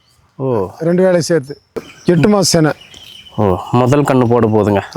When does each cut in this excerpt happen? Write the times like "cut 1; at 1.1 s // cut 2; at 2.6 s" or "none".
cut 1; at 1.9 s